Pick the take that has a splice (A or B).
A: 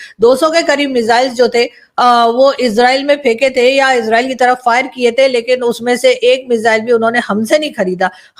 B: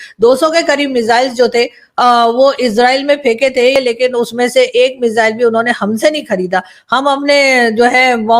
B